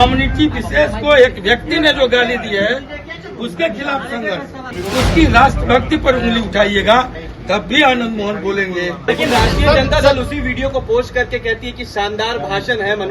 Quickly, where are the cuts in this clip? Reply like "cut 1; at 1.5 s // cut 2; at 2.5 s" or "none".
cut 1; at 4.7 s // cut 2; at 9.0 s